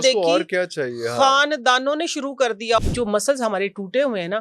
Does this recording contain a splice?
yes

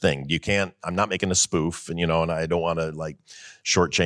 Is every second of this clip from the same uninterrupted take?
yes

